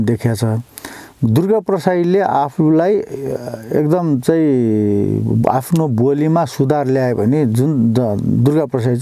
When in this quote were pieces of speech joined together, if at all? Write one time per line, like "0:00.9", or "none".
none